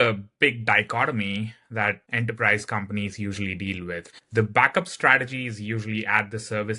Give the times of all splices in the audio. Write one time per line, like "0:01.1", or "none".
0:02.1
0:04.0